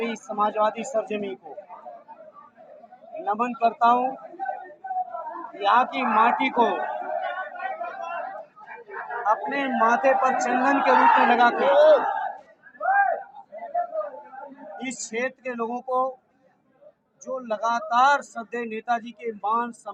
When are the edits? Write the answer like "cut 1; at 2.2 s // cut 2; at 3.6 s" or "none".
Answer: none